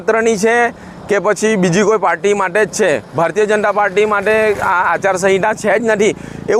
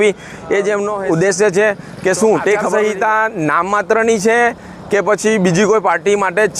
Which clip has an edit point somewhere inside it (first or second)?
second